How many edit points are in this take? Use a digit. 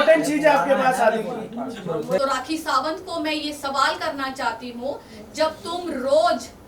1